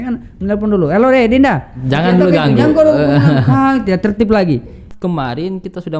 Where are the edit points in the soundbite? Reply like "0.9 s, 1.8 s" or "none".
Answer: 4.9 s